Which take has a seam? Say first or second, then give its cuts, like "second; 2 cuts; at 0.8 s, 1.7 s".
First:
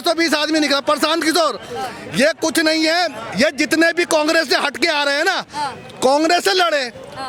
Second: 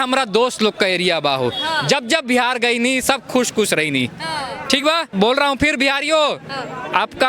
second; 1 cut; at 5.1 s